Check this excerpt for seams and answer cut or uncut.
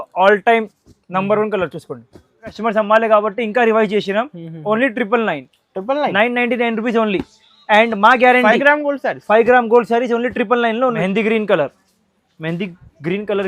cut